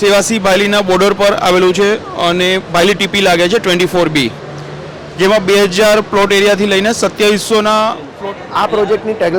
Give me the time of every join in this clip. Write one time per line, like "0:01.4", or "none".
0:08.1

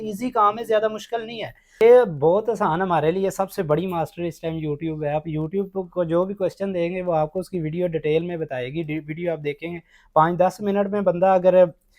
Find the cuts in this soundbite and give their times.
0:01.8

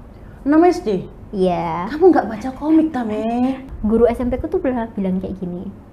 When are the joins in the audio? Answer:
0:03.6

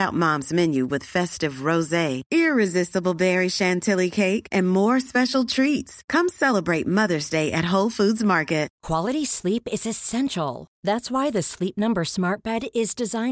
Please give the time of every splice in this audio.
0:08.8

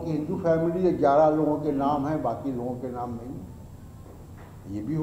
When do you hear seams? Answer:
none

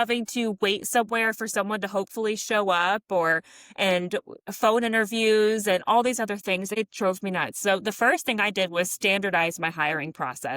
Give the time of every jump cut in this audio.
0:06.7

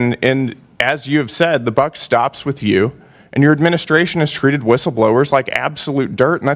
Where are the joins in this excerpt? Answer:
none

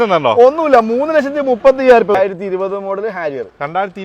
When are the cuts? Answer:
0:02.1

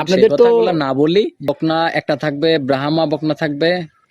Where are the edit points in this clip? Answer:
0:01.4

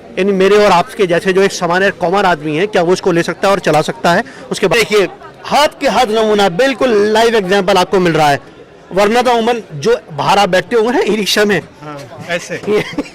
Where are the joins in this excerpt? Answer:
0:04.7

